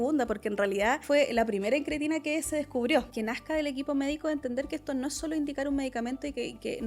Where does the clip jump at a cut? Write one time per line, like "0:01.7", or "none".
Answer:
0:01.0
0:03.1